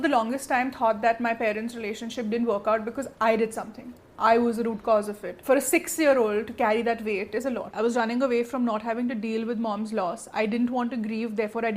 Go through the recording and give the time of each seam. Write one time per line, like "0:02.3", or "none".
0:05.3
0:07.7